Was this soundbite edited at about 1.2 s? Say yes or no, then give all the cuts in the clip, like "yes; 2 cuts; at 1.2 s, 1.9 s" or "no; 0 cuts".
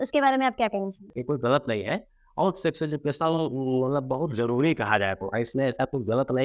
yes; 1 cut; at 1.2 s